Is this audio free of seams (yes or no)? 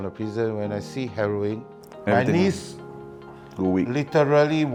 yes